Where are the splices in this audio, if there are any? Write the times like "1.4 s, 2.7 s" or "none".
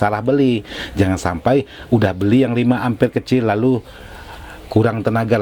none

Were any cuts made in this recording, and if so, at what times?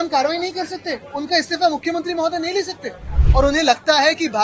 3.1 s

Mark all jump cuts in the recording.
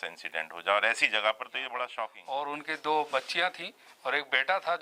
2.2 s

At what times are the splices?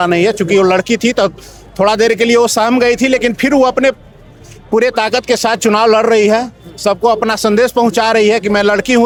none

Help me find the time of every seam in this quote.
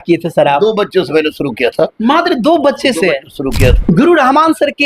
3.8 s

